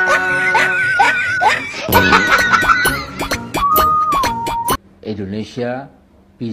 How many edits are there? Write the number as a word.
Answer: one